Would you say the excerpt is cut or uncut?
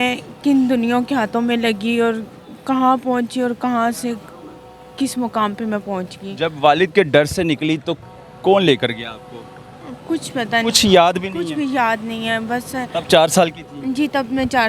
uncut